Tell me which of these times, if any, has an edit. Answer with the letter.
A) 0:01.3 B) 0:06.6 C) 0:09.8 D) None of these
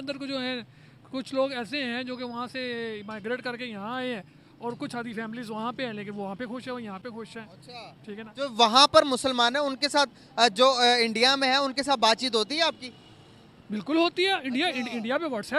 D